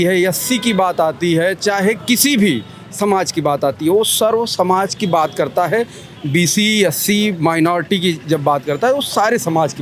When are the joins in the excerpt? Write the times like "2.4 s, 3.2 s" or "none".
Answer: none